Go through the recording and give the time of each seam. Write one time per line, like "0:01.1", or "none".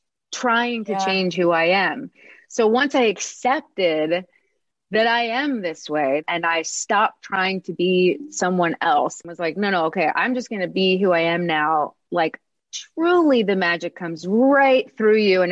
0:06.2
0:09.2